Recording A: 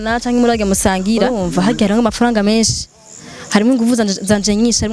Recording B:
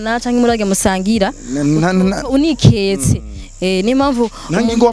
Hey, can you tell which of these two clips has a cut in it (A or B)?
A